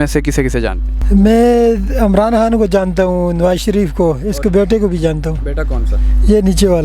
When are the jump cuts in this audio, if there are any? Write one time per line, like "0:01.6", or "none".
0:00.9

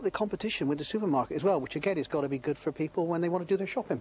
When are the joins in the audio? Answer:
none

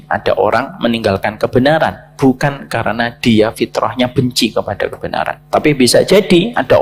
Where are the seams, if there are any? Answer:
none

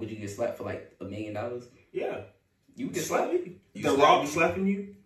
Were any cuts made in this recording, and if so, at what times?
0:03.7

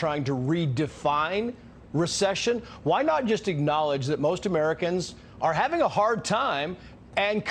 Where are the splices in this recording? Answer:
none

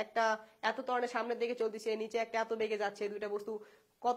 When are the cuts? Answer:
none

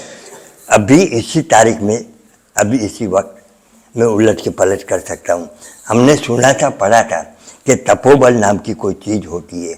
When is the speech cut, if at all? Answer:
none

